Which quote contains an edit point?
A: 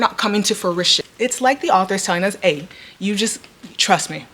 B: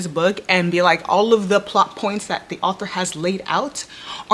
A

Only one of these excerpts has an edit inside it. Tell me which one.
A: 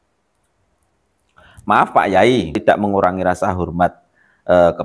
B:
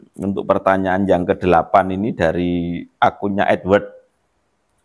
A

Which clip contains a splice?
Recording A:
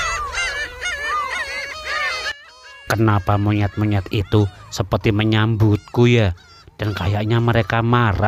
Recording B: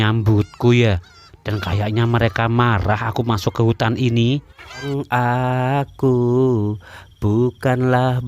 B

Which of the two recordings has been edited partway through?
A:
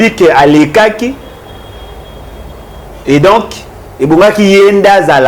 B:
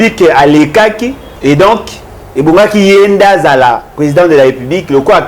B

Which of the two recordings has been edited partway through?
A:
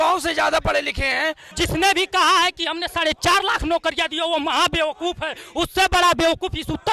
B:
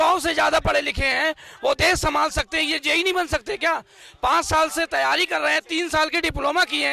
A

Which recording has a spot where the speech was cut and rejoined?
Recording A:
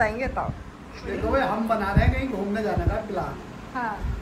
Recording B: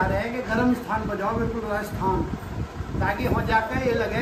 A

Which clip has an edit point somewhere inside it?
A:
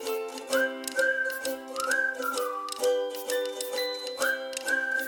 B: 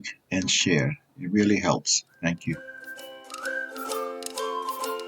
B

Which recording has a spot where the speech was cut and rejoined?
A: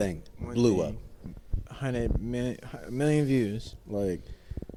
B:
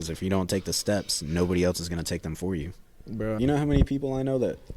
B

